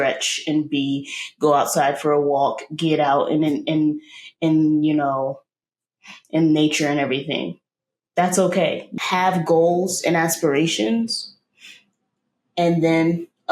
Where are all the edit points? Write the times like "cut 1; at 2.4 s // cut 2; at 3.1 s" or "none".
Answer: cut 1; at 8.9 s